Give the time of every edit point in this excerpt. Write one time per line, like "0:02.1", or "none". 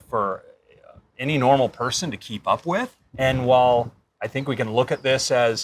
0:03.0